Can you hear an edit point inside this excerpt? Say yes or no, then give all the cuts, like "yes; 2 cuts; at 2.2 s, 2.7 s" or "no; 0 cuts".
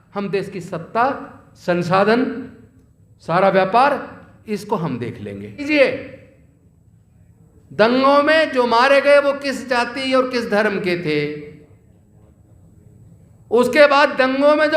yes; 1 cut; at 5.6 s